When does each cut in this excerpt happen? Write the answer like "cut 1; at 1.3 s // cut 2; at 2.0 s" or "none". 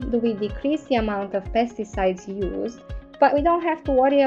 cut 1; at 3.2 s